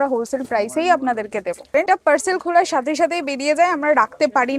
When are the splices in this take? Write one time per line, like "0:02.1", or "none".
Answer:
0:01.7